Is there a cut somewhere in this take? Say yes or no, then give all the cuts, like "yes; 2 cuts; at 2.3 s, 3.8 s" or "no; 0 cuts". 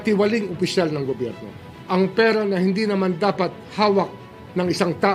yes; 1 cut; at 1.7 s